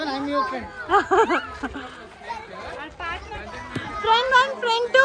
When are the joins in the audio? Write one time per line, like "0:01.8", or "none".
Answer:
none